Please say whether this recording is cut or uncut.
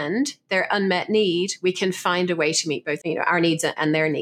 cut